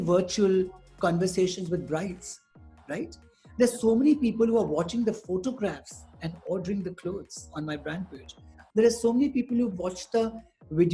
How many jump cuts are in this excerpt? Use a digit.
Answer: 0